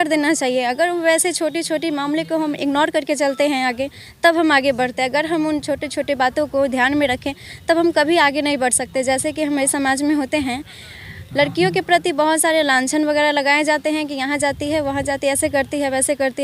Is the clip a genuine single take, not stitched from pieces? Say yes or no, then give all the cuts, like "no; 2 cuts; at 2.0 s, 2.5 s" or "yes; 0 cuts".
yes; 0 cuts